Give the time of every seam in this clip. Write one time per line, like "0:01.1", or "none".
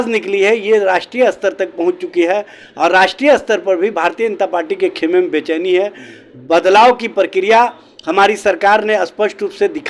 none